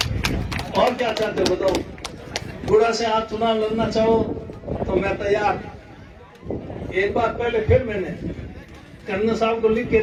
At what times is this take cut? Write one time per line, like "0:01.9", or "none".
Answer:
none